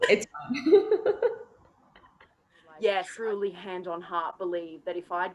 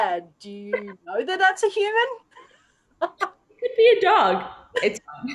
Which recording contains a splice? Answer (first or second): first